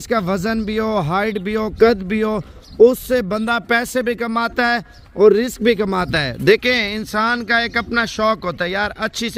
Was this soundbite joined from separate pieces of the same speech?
no; 0 cuts

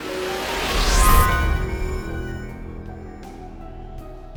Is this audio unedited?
yes; 0 cuts

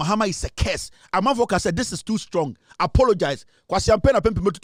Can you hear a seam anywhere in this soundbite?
no; 0 cuts

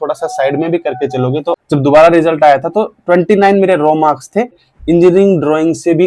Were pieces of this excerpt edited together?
yes; 2 cuts; at 1.6 s, 4.7 s

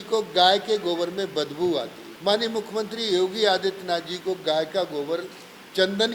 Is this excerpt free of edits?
no; 1 cut; at 2.0 s

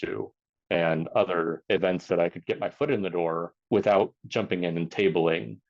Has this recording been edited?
yes; 3 cuts; at 1.6 s, 3.6 s, 4.2 s

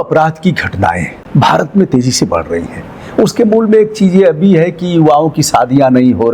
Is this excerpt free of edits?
no; 1 cut; at 1.1 s

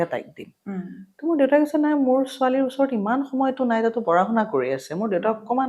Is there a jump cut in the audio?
no; 0 cuts

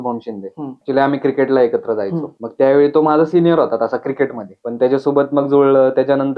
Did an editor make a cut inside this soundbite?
no; 0 cuts

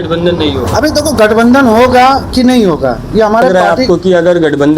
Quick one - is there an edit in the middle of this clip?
yes; 1 cut; at 3.5 s

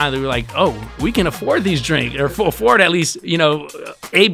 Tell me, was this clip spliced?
no; 0 cuts

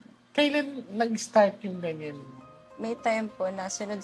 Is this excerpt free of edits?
no; 1 cut; at 2.6 s

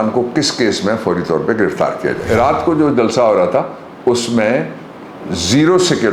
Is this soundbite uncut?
no; 1 cut; at 2.3 s

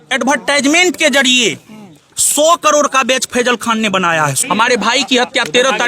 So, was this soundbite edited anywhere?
yes; 1 cut; at 4.4 s

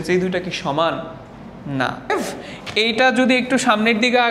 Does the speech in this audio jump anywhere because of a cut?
yes; 1 cut; at 2.1 s

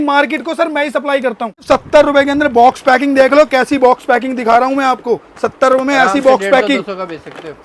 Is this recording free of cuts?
no; 1 cut; at 1.6 s

